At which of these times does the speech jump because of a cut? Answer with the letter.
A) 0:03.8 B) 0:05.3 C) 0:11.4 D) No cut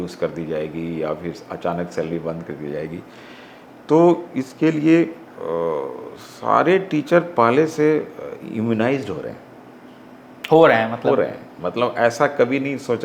D